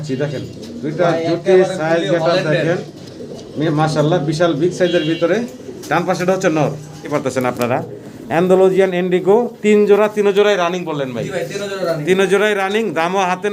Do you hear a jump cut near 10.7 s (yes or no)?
no